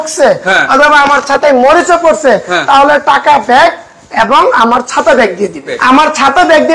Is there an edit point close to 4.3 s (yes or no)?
no